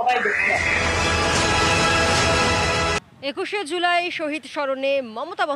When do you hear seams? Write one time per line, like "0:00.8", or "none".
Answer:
0:03.0